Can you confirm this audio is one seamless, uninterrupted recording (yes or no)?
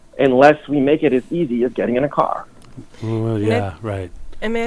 yes